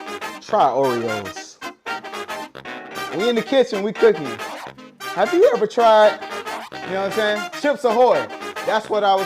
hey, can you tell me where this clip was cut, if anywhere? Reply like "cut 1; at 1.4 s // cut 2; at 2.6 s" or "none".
none